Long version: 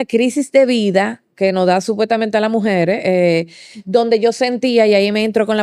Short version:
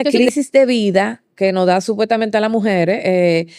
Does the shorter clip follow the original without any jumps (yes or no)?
yes